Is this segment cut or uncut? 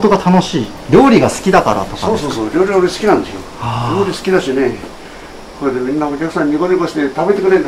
uncut